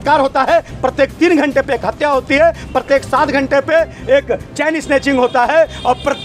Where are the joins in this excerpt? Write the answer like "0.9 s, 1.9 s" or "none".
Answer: none